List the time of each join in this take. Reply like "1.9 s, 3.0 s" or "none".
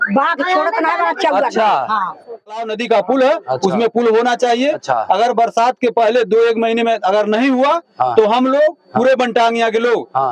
2.6 s

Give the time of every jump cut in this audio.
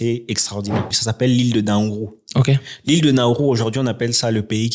1.0 s

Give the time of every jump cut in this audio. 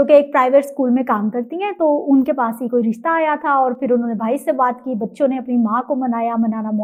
none

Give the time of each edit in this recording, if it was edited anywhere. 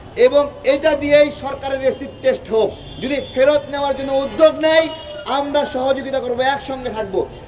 2.9 s

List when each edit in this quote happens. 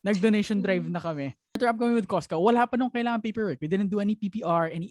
1.6 s

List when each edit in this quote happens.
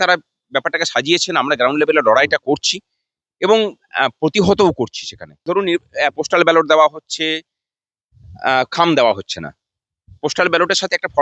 5.4 s

